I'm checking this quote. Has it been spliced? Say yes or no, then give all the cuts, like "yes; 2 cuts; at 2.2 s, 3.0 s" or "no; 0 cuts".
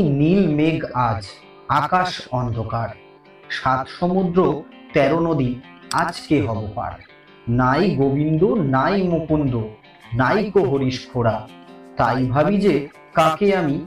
no; 0 cuts